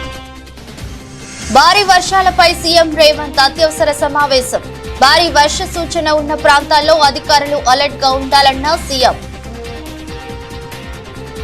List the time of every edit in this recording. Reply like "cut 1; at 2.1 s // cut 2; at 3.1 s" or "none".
cut 1; at 1.5 s // cut 2; at 9.2 s